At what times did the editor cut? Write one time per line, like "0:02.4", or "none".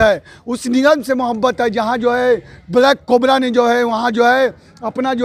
none